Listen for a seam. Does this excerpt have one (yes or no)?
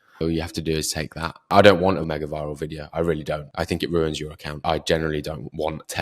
yes